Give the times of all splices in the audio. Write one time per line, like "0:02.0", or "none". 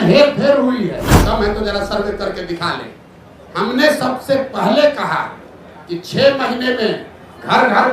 0:01.1